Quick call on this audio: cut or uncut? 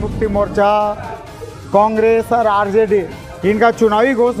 uncut